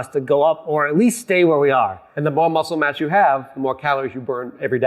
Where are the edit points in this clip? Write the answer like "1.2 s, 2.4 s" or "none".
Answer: none